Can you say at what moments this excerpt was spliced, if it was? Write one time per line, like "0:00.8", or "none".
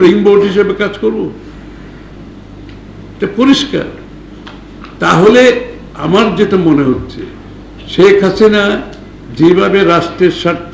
none